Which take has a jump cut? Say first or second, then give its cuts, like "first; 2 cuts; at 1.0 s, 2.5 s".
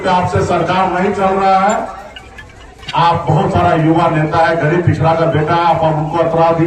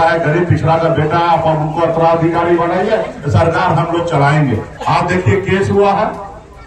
second; 1 cut; at 4.7 s